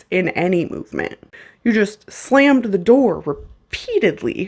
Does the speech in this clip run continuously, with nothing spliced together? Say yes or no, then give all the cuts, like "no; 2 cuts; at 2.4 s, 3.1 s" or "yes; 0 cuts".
no; 1 cut; at 1.4 s